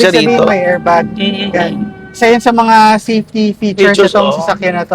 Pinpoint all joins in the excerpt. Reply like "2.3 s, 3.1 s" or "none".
none